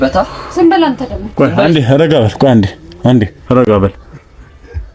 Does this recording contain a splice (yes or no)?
no